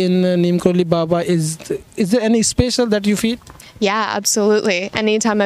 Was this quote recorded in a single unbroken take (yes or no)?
yes